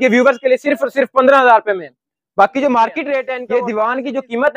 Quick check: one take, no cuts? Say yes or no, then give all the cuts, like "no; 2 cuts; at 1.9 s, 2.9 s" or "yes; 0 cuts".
no; 1 cut; at 3.4 s